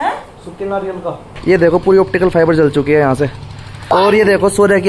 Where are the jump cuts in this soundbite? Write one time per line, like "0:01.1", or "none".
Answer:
0:01.3
0:03.7